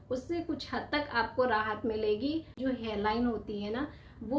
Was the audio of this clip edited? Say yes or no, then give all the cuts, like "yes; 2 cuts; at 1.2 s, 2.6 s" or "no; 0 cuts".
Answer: yes; 1 cut; at 2.5 s